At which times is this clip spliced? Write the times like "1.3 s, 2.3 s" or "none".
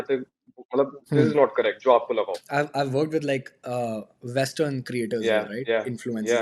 2.4 s